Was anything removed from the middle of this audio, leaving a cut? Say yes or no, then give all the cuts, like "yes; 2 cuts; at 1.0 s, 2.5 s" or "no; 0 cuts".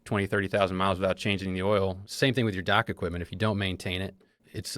yes; 1 cut; at 2.0 s